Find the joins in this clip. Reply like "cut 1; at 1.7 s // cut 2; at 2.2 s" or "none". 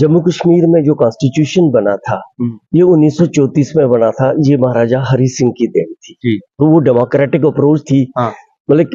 none